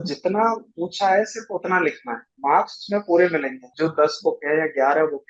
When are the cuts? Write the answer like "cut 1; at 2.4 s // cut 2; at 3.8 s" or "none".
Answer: cut 1; at 2.3 s // cut 2; at 3.6 s